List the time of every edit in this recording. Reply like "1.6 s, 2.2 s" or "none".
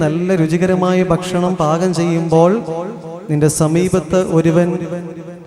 none